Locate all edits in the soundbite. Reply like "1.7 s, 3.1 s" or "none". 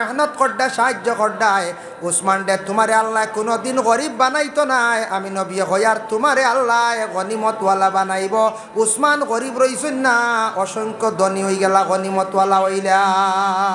none